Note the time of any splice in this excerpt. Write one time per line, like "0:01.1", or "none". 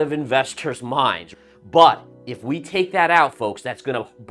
0:01.3